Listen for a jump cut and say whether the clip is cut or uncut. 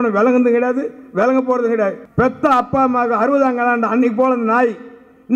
cut